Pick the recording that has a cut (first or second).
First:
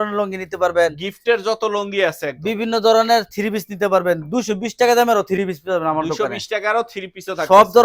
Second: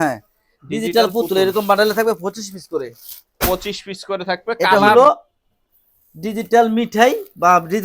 second